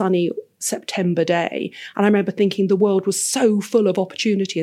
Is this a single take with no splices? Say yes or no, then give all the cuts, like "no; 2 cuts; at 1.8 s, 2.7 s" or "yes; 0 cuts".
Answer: yes; 0 cuts